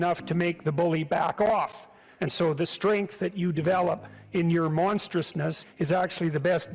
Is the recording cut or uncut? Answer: cut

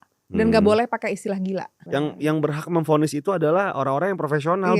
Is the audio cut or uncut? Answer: cut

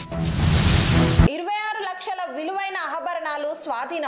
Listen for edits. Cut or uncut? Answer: cut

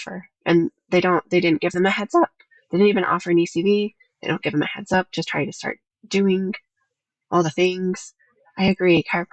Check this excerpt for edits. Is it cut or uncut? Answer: uncut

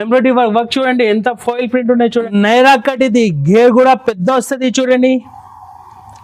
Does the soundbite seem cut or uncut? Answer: cut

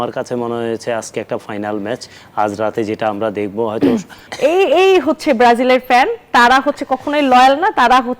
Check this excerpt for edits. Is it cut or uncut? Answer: cut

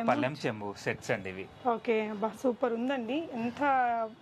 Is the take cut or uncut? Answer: uncut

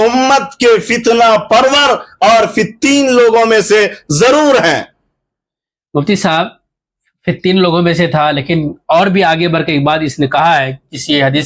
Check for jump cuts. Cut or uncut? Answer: uncut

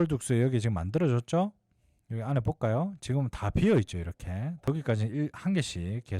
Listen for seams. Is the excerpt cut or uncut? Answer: cut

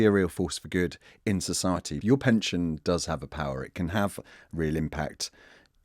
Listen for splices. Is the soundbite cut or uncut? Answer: cut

